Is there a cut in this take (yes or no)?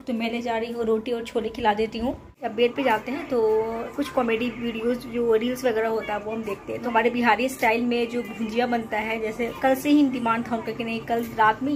yes